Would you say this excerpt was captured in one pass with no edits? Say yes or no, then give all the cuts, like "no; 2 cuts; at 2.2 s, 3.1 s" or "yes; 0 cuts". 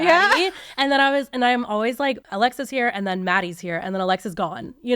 no; 1 cut; at 2.2 s